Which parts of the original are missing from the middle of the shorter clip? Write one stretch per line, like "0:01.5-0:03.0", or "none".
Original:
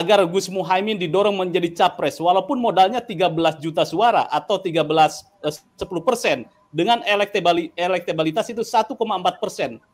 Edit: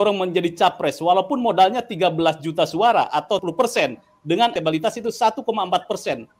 0:04.6-0:05.9
0:07.0-0:08.1

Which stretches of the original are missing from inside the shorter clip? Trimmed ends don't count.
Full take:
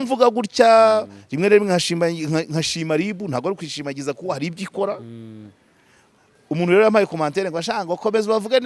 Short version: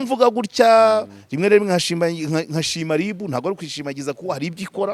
none

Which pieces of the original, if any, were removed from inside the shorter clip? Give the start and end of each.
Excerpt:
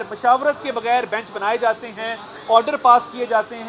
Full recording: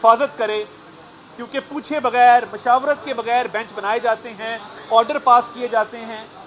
none

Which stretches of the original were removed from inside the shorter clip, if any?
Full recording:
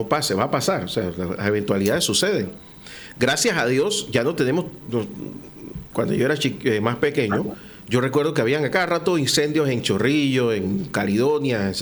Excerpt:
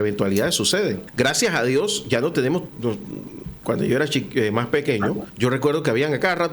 0:02.5-0:03.1
0:04.8-0:05.1
0:07.6-0:07.8

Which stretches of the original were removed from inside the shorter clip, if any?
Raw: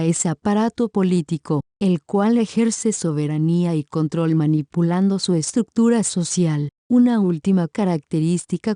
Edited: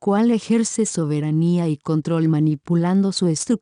none

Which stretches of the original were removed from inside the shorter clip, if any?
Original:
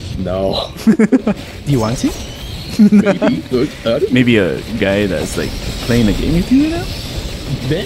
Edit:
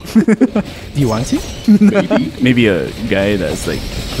0:02.2-0:02.6
0:03.5-0:04.1

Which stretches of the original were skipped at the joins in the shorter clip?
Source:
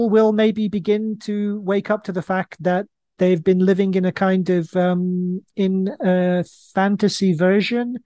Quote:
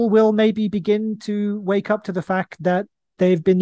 none

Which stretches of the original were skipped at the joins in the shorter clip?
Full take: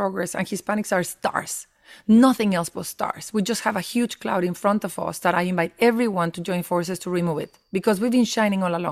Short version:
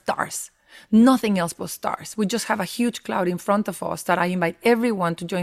none

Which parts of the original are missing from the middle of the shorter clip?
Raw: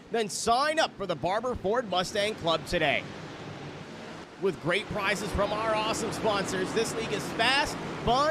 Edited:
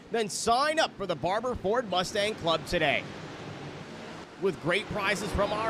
none

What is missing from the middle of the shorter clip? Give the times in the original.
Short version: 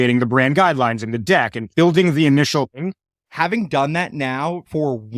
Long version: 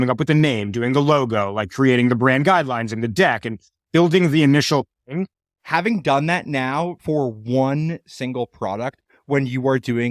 0:03.5-0:03.8
0:05.0-0:05.1

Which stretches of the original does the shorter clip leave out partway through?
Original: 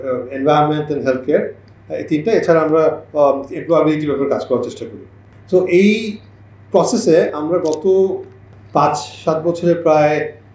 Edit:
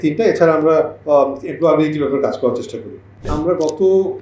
0:05.4-0:07.4

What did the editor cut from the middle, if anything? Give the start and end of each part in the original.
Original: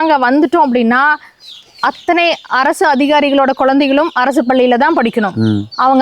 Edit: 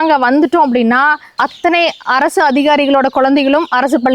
0:01.3-0:01.7

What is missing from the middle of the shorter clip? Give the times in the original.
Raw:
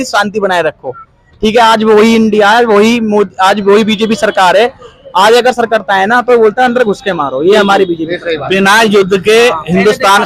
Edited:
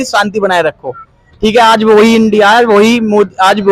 none

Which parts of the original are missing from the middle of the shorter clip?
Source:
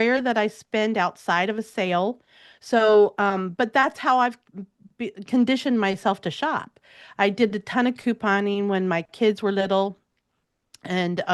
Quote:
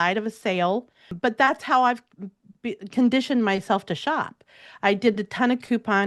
0:02.4-0:03.5

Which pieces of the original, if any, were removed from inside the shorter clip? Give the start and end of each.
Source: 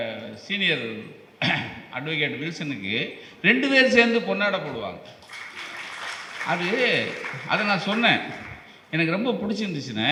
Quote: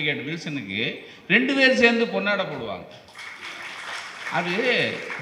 none

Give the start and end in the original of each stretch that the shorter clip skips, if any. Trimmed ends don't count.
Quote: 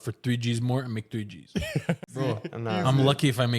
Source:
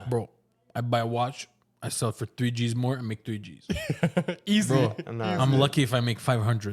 0:04.3-0:04.7

